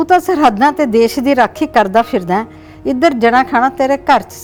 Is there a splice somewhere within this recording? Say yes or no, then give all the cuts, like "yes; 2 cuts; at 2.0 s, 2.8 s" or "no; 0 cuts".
no; 0 cuts